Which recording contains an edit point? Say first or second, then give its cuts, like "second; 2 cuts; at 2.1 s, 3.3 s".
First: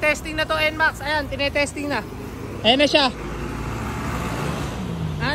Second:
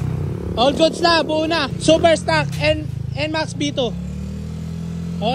second; 1 cut; at 1.7 s